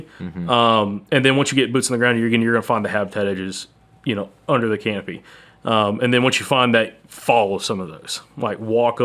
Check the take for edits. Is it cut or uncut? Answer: uncut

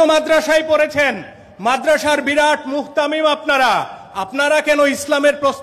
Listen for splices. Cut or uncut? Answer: uncut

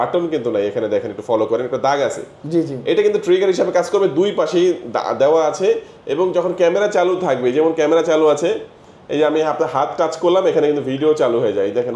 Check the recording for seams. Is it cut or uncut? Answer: uncut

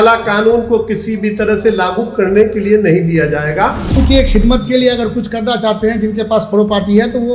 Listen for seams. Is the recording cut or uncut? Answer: cut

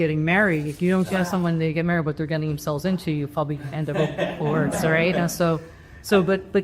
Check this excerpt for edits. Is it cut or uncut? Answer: uncut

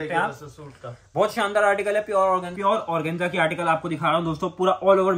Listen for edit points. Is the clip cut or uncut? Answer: cut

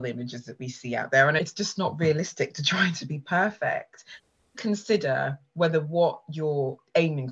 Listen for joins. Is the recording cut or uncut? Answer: cut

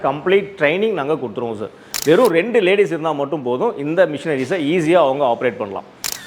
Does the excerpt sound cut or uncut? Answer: cut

